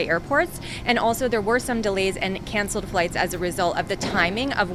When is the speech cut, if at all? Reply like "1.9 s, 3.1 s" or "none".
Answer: none

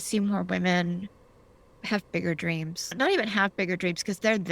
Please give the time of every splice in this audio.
2.9 s

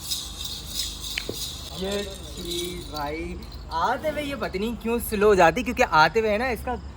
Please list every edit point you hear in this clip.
1.7 s

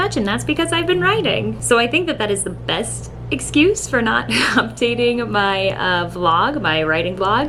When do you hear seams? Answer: none

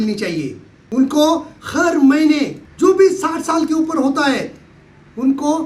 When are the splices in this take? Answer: 1.6 s, 2.6 s

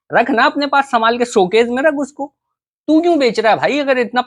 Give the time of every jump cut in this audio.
none

